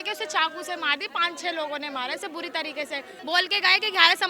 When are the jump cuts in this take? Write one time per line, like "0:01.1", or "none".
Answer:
0:03.1